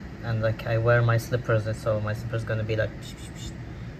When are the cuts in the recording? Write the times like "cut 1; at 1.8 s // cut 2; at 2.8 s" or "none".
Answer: none